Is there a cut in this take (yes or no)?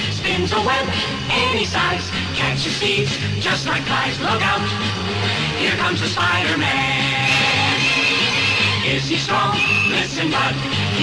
no